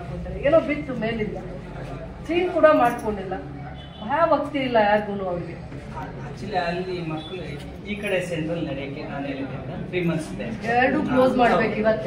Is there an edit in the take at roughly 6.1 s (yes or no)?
no